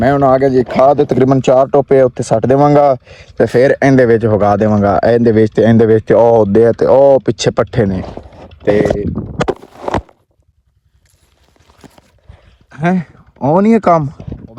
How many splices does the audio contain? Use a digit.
0